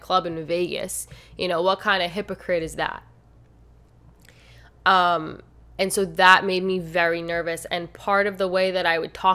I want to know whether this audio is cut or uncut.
uncut